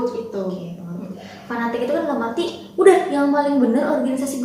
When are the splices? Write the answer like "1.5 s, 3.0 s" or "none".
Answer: 1.1 s

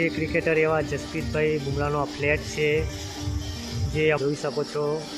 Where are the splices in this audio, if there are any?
4.2 s

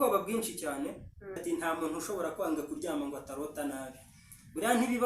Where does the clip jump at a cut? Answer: 1.4 s

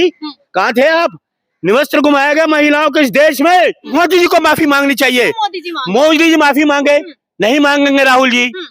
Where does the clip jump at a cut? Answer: 3.9 s

